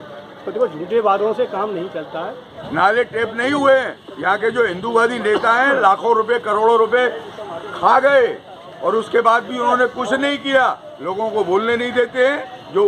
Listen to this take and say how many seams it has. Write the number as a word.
one